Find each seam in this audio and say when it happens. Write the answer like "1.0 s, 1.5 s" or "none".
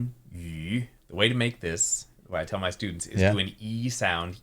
1.0 s